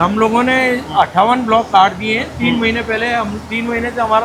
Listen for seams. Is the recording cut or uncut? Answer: uncut